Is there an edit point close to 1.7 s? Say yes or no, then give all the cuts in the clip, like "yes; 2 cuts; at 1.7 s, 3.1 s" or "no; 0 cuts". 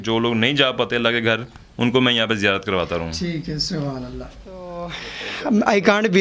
no; 1 cut; at 4.6 s